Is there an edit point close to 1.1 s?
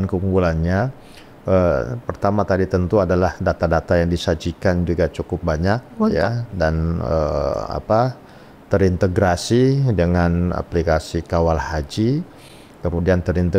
no; 0 cuts

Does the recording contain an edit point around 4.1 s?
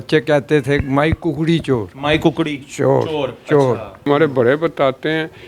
yes; 1 cut; at 4.1 s

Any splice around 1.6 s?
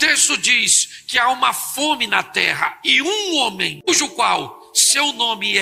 no; 1 cut; at 3.9 s

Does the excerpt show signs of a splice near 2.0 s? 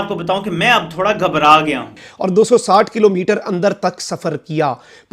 yes; 1 cut; at 2.0 s

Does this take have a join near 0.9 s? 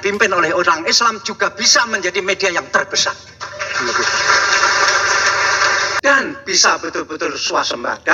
no; 1 cut; at 5.9 s

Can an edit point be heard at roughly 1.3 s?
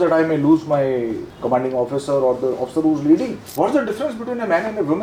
yes; 2 cuts; at 1.3 s, 3.4 s

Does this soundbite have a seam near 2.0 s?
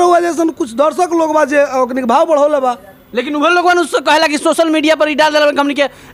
no; 0 cuts

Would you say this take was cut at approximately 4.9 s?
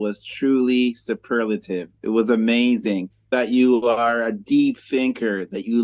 no; 1 cut; at 3.3 s

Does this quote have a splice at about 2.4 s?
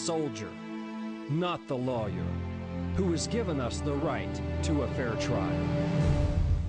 no; 1 cut; at 5.4 s

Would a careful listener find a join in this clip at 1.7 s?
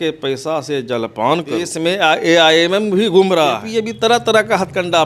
yes; 2 cuts; at 1.7 s, 3.6 s

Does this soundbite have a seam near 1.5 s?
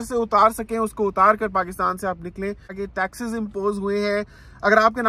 no; 1 cut; at 2.8 s

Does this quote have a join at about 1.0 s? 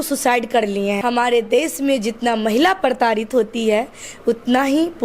yes; 1 cut; at 1.0 s

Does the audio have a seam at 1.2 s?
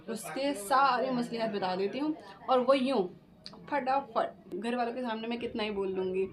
no; 1 cut; at 4.6 s

